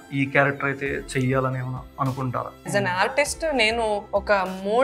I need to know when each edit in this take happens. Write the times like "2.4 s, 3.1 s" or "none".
2.7 s, 4.0 s